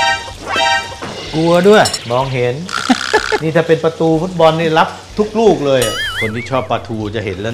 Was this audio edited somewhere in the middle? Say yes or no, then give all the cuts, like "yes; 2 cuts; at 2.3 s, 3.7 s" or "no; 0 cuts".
yes; 2 cuts; at 2.0 s, 6.0 s